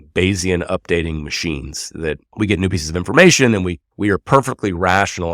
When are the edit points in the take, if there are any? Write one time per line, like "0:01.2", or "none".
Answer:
0:02.3
0:03.8

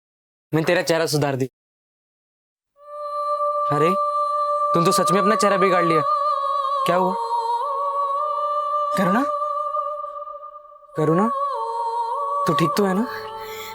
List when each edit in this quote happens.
none

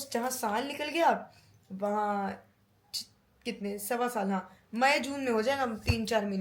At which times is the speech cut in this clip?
none

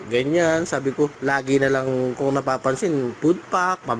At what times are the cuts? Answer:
0:01.2
0:03.1

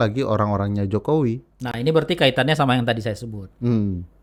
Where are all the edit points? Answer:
none

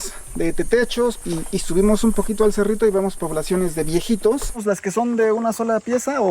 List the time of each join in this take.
0:01.2
0:04.6

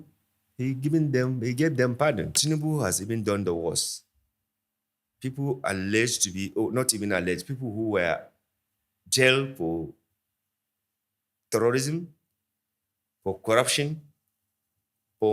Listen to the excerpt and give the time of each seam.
0:02.3

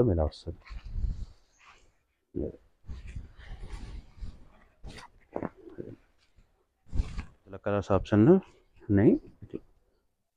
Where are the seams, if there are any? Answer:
0:07.7

